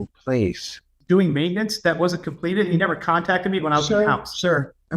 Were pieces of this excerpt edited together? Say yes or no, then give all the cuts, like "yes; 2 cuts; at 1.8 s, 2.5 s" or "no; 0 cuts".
yes; 1 cut; at 0.9 s